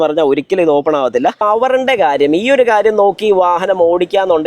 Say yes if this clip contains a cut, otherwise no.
yes